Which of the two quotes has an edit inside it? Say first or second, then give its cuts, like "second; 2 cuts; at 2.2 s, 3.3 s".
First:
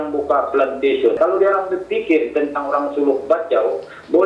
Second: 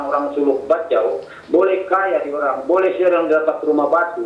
first; 1 cut; at 1.2 s